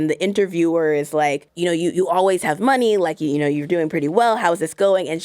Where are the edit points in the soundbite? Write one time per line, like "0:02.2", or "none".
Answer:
0:01.5